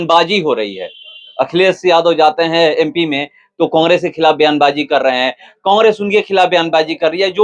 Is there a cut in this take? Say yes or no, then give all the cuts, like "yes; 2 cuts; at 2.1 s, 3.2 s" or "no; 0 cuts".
no; 0 cuts